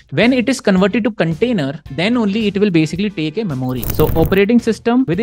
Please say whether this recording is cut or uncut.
cut